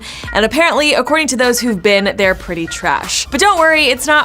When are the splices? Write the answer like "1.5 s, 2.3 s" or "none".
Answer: 3.2 s